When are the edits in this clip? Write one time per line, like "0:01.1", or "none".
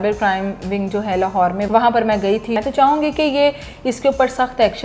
0:02.6